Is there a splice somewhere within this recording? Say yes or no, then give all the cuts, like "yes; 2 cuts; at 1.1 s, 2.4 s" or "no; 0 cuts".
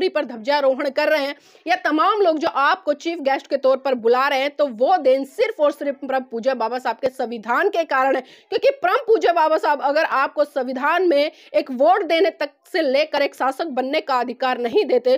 no; 0 cuts